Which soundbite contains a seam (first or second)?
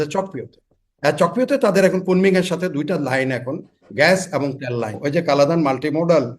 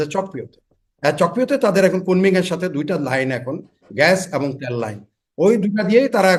first